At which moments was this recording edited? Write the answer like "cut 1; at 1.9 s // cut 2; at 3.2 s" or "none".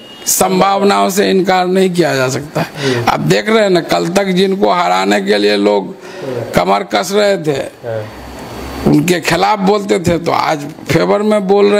none